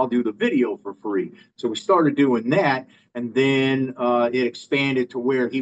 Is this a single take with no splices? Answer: yes; 0 cuts

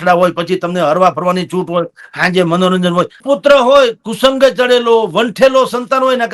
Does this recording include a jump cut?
yes; 1 cut; at 3.2 s

